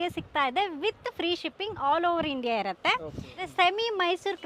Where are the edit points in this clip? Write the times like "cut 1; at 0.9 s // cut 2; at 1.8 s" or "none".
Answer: cut 1; at 3.4 s

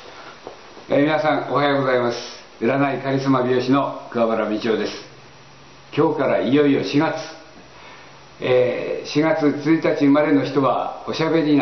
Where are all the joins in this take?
none

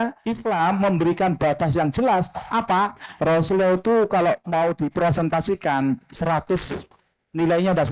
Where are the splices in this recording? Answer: cut 1; at 3.0 s

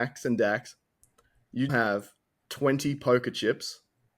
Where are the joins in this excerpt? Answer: cut 1; at 1.7 s

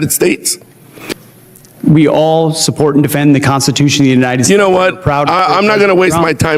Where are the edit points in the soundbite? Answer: cut 1; at 1.1 s

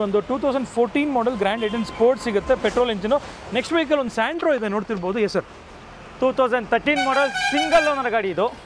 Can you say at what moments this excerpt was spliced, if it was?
none

